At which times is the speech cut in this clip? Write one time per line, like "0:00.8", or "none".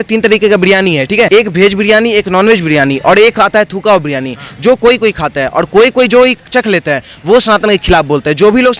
0:01.3